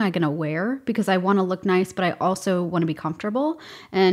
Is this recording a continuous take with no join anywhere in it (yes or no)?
yes